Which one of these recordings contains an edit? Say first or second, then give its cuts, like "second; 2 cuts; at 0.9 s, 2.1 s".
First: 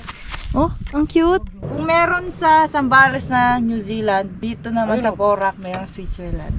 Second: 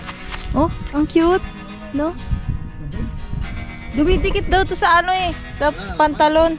first; 2 cuts; at 1.6 s, 4.4 s